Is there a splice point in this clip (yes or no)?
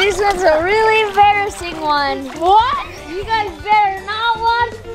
no